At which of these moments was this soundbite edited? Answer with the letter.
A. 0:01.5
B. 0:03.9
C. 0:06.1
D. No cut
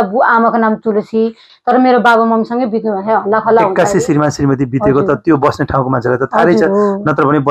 A